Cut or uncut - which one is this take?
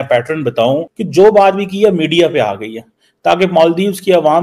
cut